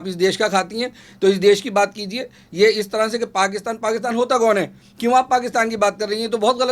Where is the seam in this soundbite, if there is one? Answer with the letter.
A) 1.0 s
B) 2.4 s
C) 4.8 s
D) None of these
D